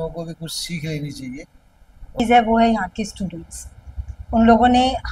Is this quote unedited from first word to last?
no; 1 cut; at 2.2 s

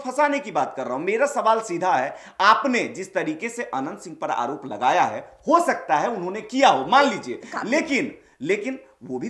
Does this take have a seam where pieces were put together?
no; 0 cuts

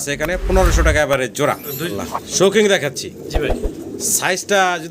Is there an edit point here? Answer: yes; 1 cut; at 1.8 s

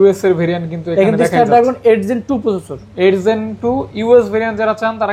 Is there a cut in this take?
no; 0 cuts

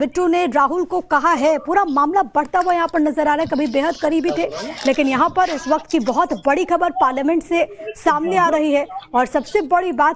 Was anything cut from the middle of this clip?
yes; 1 cut; at 8.3 s

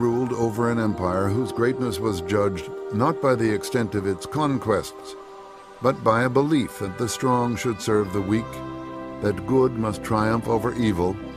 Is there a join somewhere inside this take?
yes; 1 cut; at 6.6 s

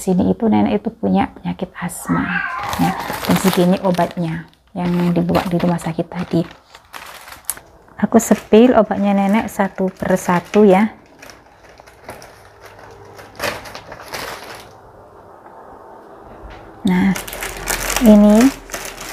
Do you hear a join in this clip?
no; 0 cuts

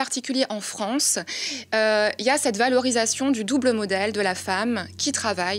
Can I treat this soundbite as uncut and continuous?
yes; 0 cuts

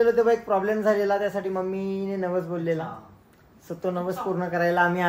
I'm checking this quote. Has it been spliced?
no; 0 cuts

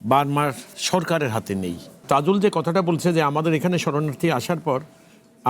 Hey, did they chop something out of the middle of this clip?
yes; 1 cut; at 2.0 s

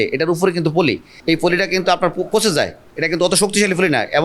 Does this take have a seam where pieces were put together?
yes; 1 cut; at 1.1 s

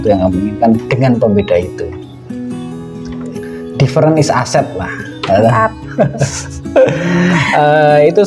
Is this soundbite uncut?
yes; 0 cuts

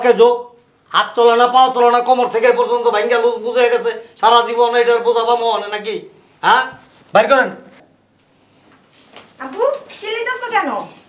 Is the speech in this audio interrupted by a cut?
no; 0 cuts

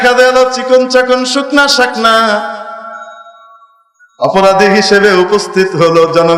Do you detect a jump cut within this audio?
no; 0 cuts

